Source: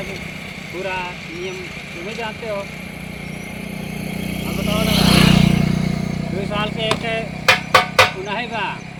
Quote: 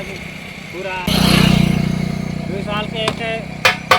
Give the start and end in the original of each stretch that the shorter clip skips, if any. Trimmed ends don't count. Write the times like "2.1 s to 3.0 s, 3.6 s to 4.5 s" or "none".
1.1 s to 4.9 s